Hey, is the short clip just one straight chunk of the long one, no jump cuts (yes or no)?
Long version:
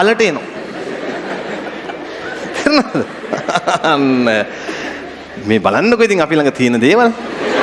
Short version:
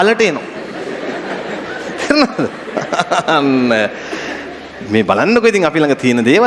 no